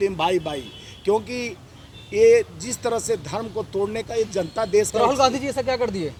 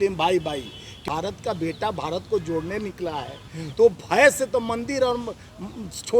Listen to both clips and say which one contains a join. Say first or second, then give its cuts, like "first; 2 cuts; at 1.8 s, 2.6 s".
second; 1 cut; at 1.0 s